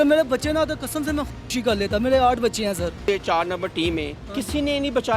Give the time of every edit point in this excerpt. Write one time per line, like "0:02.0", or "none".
0:03.1